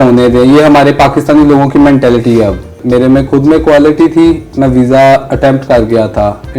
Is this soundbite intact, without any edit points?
no; 1 cut; at 2.7 s

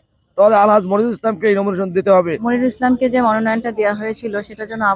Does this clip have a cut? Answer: yes; 1 cut; at 2.4 s

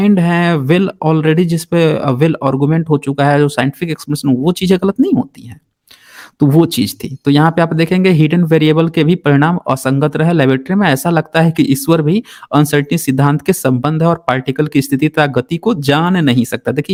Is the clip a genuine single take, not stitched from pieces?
yes; 0 cuts

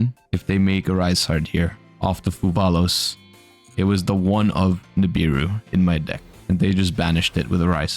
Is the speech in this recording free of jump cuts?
no; 1 cut; at 6.3 s

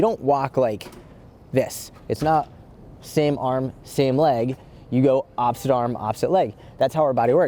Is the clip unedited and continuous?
yes; 0 cuts

